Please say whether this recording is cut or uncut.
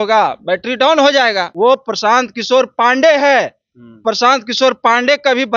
cut